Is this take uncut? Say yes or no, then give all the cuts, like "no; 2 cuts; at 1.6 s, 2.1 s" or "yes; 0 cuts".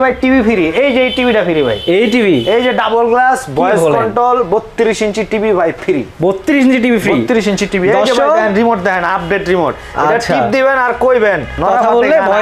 yes; 0 cuts